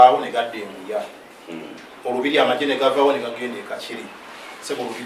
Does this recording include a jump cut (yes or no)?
no